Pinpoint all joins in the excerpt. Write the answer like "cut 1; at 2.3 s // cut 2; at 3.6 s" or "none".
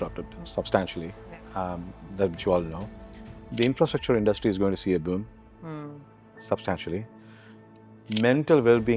none